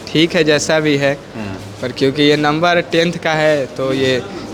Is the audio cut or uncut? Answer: uncut